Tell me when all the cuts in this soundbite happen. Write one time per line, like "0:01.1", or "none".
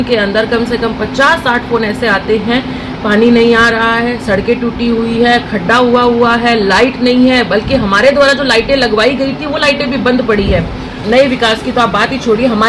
0:11.0